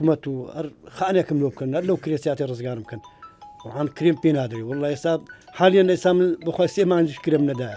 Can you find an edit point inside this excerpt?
no; 0 cuts

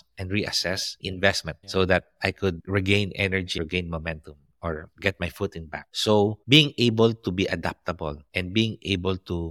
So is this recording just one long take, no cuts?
no; 2 cuts; at 1.0 s, 3.6 s

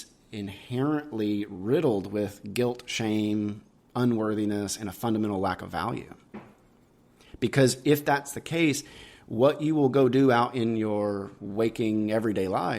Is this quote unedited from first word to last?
yes; 0 cuts

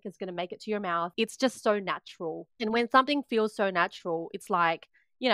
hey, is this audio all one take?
no; 2 cuts; at 1.1 s, 2.5 s

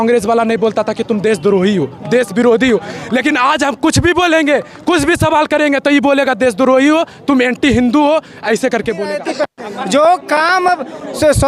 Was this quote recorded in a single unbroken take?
no; 1 cut; at 9.2 s

